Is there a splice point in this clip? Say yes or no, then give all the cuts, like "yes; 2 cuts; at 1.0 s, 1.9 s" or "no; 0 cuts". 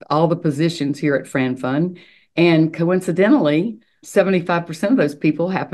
yes; 1 cut; at 4.0 s